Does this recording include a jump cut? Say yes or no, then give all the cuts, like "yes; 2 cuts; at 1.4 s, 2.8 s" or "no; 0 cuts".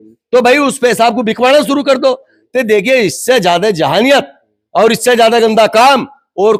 no; 0 cuts